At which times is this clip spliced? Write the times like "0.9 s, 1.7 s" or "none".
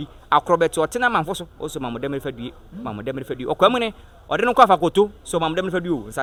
none